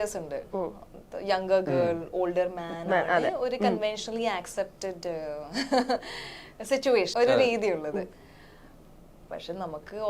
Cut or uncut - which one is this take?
cut